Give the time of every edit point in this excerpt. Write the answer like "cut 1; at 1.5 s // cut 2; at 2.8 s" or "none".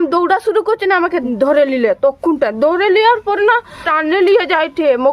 cut 1; at 1.2 s // cut 2; at 3.8 s